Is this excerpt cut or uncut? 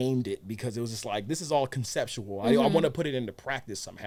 uncut